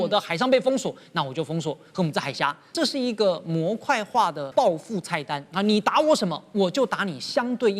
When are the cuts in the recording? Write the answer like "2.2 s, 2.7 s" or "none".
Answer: 2.7 s, 4.4 s

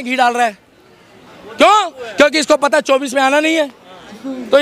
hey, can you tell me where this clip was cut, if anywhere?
none

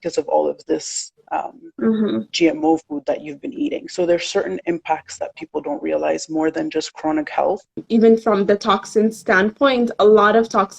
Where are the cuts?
7.8 s

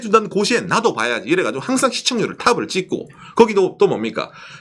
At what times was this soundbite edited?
none

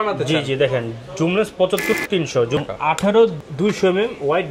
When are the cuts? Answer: 2.4 s, 3.4 s

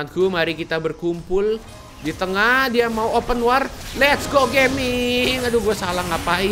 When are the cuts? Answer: none

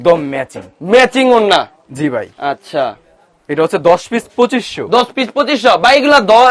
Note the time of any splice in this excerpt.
none

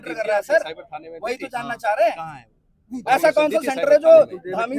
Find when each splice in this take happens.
none

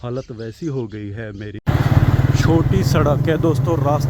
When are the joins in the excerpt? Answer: 1.6 s

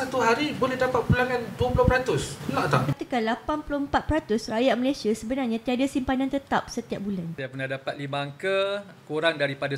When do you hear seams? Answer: 3.0 s, 7.5 s

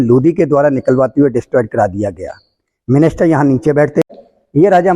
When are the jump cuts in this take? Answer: 4.0 s

